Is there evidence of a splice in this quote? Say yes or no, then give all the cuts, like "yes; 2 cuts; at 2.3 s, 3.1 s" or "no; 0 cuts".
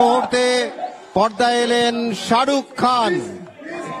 no; 0 cuts